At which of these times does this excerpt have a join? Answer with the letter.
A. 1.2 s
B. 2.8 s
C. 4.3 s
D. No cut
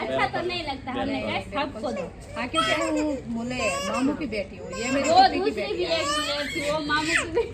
B